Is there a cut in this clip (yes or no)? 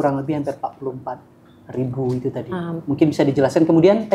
no